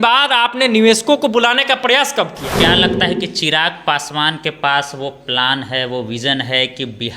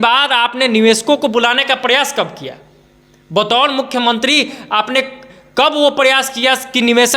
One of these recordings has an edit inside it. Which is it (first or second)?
first